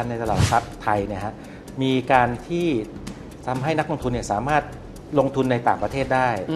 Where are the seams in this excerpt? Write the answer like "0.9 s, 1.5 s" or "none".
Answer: none